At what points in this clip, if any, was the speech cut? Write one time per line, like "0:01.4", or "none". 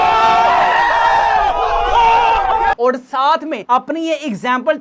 0:02.8